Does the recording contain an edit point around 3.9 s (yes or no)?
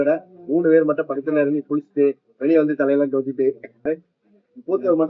yes